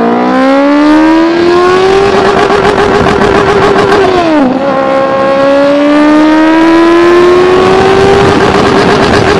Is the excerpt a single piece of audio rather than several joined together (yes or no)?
yes